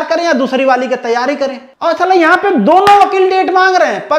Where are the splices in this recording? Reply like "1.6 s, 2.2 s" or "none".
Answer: 1.7 s